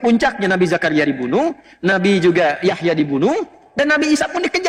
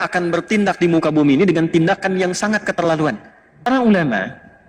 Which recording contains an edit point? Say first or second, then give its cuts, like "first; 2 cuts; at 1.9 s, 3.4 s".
second; 1 cut; at 3.6 s